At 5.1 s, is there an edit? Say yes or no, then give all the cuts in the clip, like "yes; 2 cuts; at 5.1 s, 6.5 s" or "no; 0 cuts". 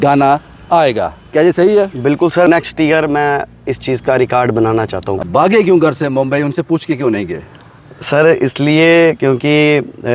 yes; 2 cuts; at 2.5 s, 5.1 s